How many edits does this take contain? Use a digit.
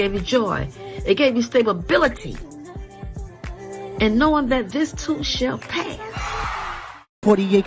1